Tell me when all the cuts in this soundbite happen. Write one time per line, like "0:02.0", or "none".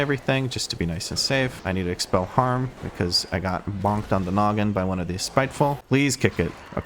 0:05.8